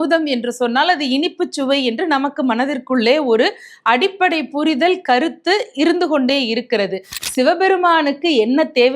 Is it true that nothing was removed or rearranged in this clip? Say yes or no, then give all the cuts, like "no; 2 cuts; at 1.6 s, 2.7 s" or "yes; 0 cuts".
no; 1 cut; at 7.2 s